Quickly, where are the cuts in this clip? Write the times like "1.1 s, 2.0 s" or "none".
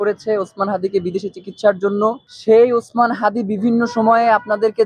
2.3 s